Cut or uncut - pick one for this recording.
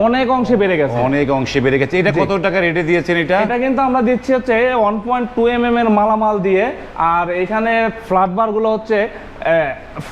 uncut